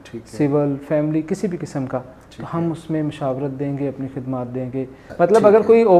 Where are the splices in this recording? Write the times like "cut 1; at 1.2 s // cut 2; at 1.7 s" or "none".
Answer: cut 1; at 5.0 s